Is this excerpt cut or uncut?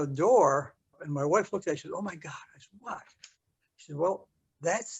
cut